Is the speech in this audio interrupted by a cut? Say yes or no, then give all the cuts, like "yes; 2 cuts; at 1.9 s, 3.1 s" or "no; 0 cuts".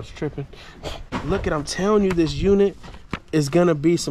yes; 1 cut; at 1.2 s